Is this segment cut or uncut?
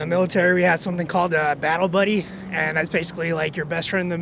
uncut